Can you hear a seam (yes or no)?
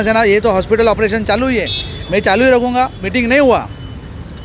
yes